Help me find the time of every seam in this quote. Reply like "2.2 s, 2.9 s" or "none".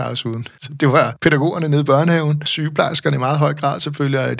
1.0 s, 2.5 s